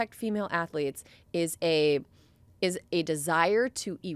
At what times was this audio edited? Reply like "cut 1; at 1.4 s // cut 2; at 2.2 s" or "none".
none